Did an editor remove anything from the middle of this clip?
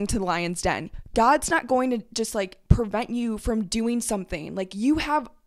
yes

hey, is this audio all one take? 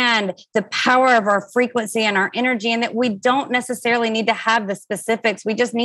yes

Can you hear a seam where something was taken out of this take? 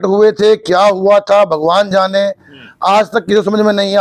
no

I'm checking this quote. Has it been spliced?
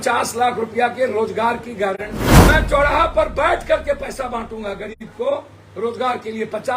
yes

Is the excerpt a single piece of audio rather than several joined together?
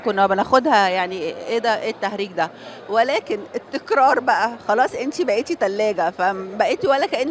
yes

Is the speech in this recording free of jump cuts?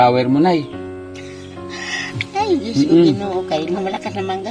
yes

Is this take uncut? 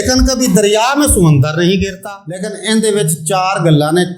no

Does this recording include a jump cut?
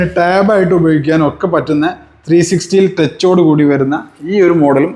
no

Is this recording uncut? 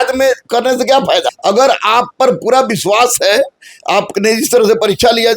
no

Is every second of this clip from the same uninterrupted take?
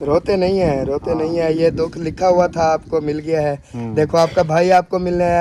yes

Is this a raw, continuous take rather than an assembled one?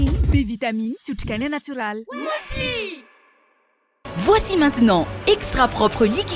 no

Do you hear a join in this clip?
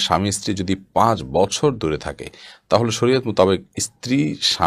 no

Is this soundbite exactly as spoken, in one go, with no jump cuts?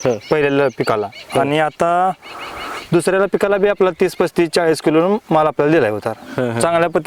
yes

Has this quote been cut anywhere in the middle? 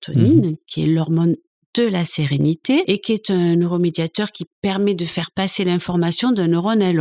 yes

